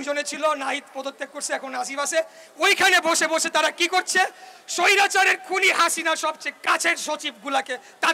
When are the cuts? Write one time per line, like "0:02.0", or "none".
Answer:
none